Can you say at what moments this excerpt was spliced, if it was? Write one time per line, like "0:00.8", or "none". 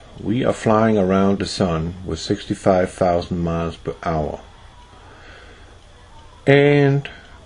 0:02.8